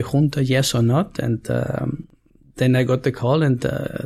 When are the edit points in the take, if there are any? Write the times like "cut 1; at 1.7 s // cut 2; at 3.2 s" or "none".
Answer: none